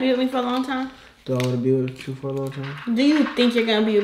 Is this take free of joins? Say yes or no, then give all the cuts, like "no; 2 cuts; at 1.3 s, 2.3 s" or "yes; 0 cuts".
yes; 0 cuts